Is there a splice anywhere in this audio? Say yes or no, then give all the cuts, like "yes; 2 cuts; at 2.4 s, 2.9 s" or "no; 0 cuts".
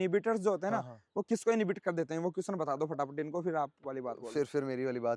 no; 0 cuts